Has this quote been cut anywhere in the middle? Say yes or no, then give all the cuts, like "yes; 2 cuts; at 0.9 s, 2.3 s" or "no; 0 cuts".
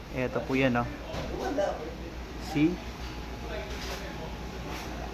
no; 0 cuts